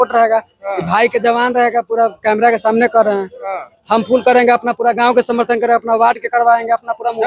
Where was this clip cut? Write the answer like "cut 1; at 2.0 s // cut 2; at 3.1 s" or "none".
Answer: none